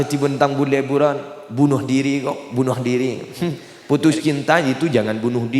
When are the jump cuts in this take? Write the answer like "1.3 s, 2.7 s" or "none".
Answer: 3.7 s